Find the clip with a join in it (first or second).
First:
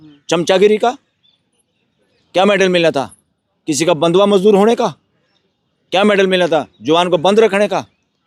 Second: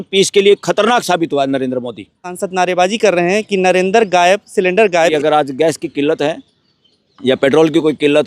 second